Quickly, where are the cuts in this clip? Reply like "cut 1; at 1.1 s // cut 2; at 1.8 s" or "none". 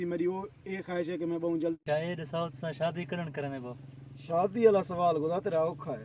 cut 1; at 1.8 s